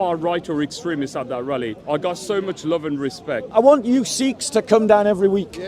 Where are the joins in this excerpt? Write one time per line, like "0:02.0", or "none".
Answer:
0:01.8
0:03.5